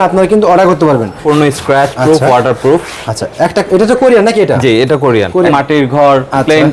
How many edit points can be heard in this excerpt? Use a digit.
2